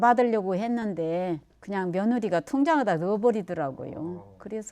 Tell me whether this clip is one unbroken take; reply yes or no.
yes